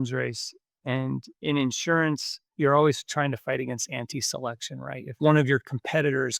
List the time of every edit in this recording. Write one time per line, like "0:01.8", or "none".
0:02.4
0:05.1